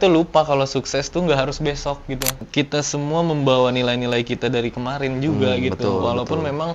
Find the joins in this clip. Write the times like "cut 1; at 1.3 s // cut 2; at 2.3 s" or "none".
cut 1; at 2.4 s